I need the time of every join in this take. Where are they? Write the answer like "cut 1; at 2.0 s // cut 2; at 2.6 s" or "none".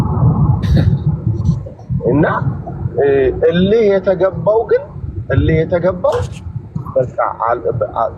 none